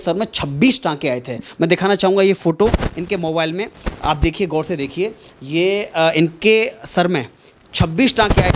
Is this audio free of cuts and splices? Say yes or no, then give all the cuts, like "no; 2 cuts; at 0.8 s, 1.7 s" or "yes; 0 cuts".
yes; 0 cuts